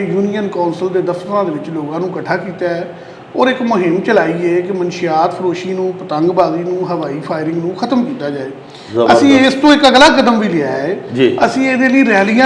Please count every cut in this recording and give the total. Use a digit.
0